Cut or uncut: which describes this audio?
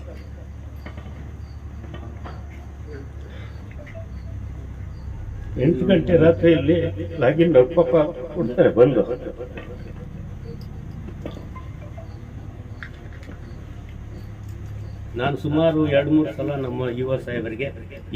cut